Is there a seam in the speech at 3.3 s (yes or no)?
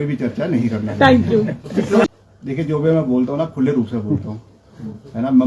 no